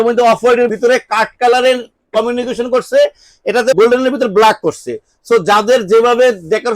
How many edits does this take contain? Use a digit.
2